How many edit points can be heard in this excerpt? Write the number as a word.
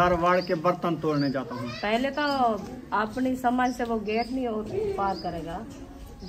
zero